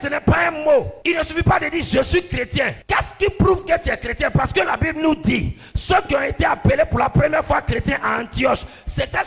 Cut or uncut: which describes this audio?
cut